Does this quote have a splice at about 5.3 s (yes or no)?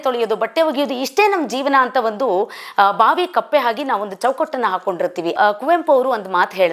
yes